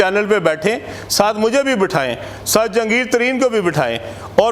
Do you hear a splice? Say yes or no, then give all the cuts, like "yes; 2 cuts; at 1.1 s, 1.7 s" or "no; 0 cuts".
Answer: no; 0 cuts